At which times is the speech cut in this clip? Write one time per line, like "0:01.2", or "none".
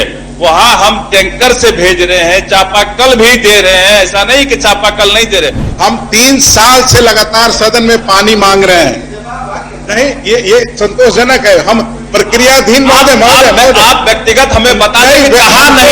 0:05.6